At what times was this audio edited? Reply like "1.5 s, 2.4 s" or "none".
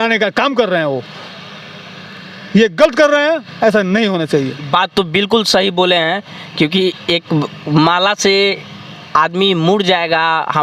none